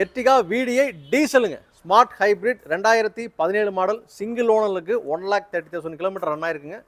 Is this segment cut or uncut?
uncut